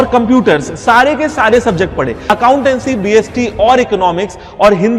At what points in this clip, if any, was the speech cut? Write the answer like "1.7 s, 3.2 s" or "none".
2.2 s